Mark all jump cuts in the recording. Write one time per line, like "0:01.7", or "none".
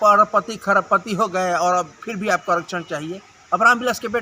none